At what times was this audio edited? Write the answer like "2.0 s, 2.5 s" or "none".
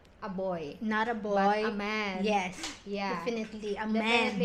none